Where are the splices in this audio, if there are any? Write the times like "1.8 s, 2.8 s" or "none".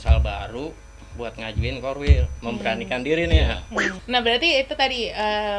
3.9 s